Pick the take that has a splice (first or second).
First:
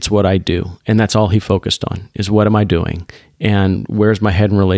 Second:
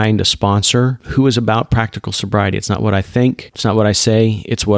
second